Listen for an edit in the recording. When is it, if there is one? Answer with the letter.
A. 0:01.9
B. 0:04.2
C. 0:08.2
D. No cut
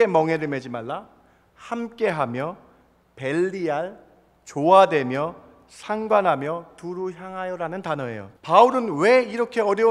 C